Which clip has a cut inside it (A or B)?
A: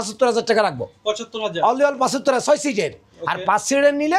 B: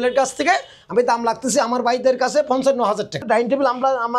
B